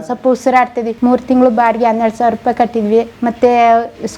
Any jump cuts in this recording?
yes; 2 cuts; at 0.9 s, 3.1 s

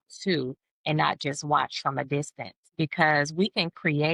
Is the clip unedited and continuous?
yes; 0 cuts

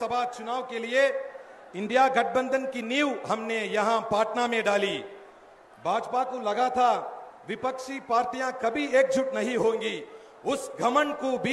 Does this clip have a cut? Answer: no; 0 cuts

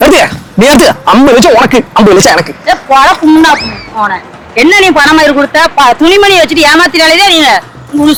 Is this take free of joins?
yes; 0 cuts

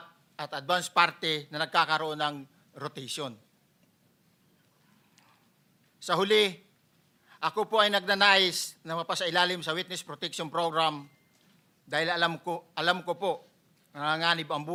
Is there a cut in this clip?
no; 0 cuts

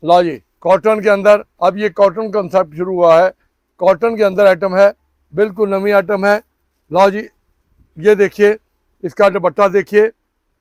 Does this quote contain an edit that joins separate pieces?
no; 0 cuts

